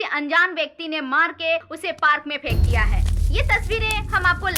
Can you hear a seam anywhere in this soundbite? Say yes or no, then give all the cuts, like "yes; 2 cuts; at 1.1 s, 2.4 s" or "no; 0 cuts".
no; 0 cuts